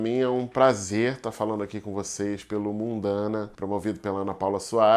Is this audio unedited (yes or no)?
no